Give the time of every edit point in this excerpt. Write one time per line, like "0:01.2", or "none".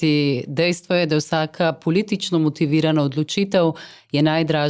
none